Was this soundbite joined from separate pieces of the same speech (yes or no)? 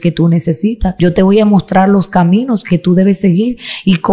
yes